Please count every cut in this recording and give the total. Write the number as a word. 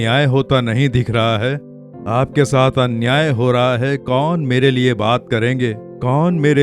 zero